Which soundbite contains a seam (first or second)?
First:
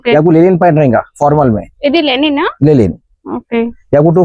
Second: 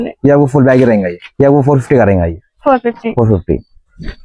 second